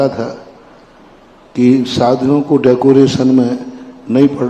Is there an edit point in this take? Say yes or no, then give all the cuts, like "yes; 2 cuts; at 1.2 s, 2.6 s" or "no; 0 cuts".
no; 0 cuts